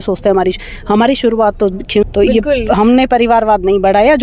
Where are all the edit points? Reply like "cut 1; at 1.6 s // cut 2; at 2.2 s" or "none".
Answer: cut 1; at 2.1 s